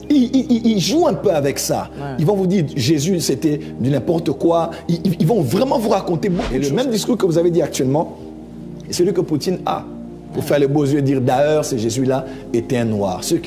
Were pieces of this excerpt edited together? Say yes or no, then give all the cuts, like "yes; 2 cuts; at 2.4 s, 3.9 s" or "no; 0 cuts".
yes; 1 cut; at 6.4 s